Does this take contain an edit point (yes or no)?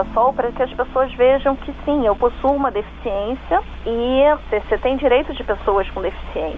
yes